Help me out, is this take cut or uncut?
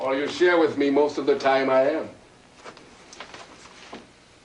uncut